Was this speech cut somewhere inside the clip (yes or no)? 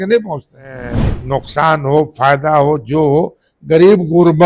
yes